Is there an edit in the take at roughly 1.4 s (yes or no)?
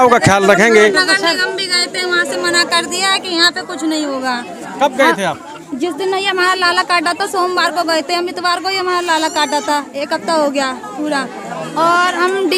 yes